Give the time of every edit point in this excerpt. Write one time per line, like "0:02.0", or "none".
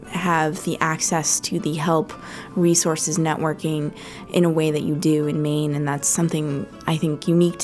none